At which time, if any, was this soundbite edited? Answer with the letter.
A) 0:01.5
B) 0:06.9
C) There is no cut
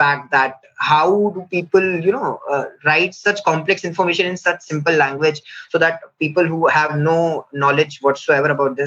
B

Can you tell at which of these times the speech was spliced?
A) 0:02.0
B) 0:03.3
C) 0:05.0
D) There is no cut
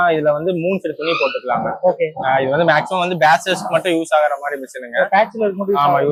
D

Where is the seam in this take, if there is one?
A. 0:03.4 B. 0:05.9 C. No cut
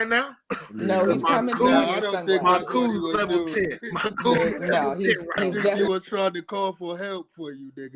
B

